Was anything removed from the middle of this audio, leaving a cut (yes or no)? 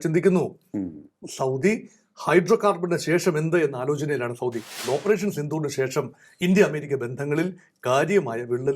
yes